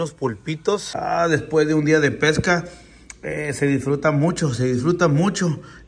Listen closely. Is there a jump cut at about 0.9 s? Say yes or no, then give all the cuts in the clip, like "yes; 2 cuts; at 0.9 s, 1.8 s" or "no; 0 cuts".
yes; 1 cut; at 0.9 s